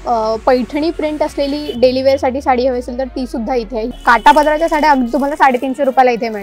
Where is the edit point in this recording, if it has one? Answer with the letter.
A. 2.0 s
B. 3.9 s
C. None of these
B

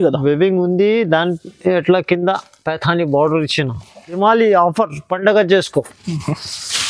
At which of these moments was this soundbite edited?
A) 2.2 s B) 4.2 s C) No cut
B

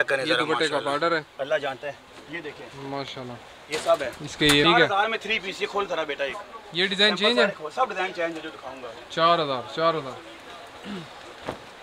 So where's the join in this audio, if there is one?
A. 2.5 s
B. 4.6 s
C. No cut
B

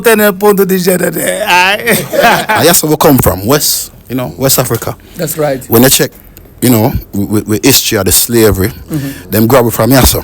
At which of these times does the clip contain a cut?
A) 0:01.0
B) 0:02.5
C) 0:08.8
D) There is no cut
B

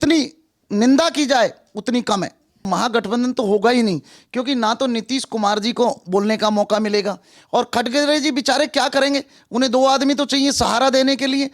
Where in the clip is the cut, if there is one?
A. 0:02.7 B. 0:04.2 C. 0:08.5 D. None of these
A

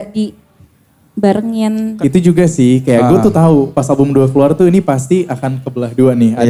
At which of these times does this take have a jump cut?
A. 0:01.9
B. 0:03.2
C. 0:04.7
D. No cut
A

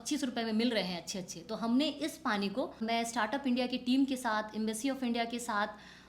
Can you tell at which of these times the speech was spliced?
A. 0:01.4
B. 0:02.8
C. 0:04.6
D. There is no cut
B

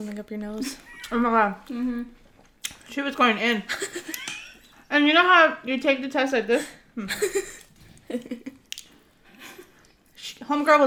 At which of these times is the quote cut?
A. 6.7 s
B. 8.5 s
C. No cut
C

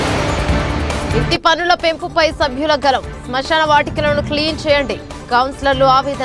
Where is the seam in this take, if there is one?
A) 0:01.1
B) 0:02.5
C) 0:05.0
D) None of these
A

